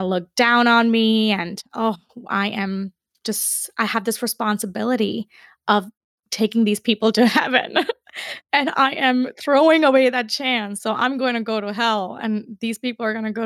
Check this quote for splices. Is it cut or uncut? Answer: uncut